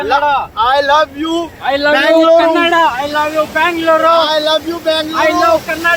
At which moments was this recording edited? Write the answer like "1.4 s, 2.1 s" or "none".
none